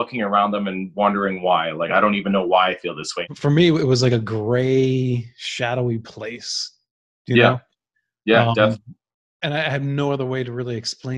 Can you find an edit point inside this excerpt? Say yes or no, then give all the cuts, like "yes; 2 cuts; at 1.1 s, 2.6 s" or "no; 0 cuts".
yes; 1 cut; at 3.2 s